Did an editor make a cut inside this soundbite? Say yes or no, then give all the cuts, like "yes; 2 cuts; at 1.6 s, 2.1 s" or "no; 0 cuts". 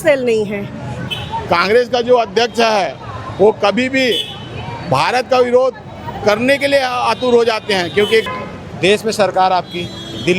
yes; 2 cuts; at 1.0 s, 8.2 s